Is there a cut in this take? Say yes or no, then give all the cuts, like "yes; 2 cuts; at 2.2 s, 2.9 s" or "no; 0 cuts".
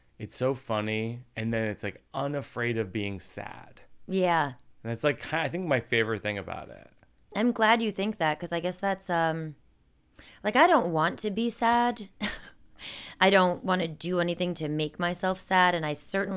no; 0 cuts